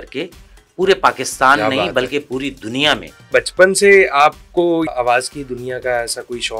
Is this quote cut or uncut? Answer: cut